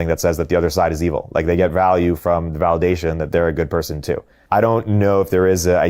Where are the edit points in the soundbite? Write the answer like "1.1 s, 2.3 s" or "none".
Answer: 4.4 s